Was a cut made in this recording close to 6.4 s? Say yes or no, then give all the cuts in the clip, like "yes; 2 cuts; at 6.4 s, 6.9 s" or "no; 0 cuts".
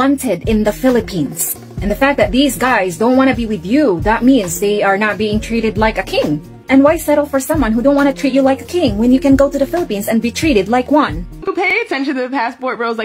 no; 1 cut; at 11.3 s